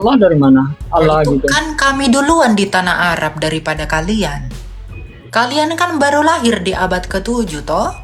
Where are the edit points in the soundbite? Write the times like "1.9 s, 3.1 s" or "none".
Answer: none